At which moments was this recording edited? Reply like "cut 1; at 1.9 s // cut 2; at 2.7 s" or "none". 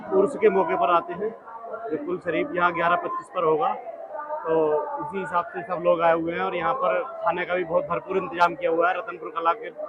none